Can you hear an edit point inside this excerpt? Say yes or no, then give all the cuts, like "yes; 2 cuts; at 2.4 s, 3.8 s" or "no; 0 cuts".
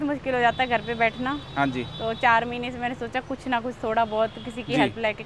no; 0 cuts